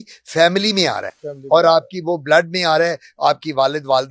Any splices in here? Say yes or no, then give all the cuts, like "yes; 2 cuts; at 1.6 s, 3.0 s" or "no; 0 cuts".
no; 0 cuts